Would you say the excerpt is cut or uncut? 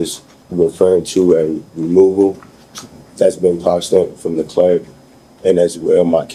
uncut